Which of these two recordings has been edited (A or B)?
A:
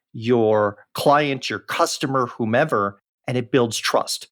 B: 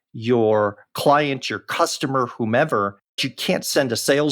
B